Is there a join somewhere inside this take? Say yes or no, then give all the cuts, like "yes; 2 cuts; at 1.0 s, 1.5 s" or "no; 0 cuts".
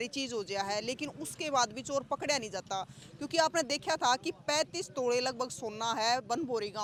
no; 0 cuts